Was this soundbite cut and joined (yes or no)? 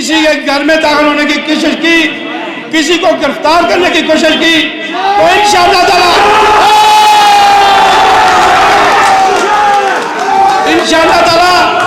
no